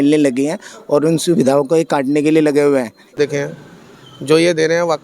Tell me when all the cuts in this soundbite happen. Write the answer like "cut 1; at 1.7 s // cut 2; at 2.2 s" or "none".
cut 1; at 3.1 s